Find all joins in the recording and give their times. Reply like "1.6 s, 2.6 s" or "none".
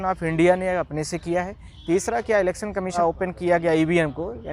3.0 s